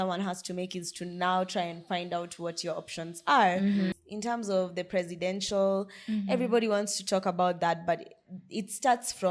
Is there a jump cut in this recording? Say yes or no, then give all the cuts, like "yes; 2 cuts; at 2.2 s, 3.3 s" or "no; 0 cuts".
yes; 1 cut; at 3.9 s